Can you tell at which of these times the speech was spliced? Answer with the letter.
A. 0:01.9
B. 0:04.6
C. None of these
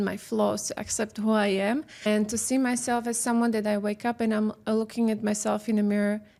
C